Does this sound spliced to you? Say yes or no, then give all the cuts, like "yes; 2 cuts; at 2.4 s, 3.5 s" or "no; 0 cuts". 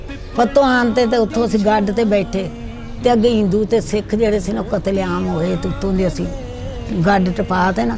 no; 0 cuts